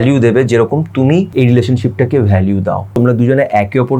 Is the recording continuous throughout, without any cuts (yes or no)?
no